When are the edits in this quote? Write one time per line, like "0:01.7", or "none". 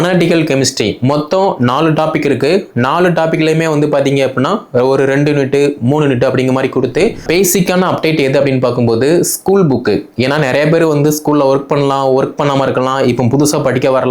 0:07.2